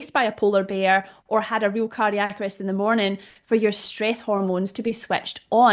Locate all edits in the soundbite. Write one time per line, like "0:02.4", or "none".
none